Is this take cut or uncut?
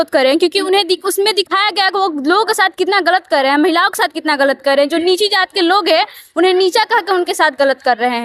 uncut